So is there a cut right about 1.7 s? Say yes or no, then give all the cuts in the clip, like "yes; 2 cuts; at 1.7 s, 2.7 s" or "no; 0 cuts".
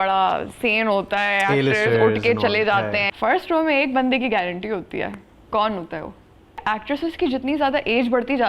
no; 2 cuts; at 3.1 s, 6.6 s